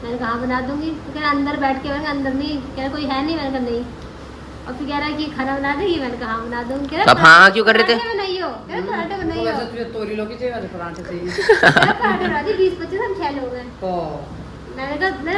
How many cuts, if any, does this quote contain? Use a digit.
0